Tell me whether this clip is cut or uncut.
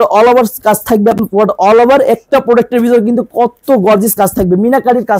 uncut